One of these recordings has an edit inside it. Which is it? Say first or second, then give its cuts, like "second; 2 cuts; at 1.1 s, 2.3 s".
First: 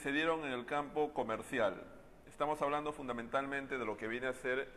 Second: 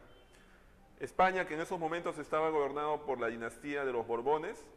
second; 1 cut; at 3.7 s